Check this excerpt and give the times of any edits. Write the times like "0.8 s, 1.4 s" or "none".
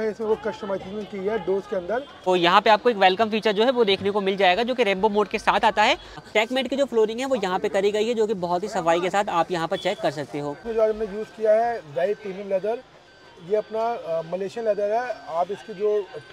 2.3 s, 6.2 s, 10.6 s